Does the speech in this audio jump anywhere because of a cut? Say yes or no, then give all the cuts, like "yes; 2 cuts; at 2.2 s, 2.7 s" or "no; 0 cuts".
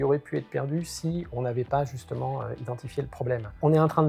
no; 0 cuts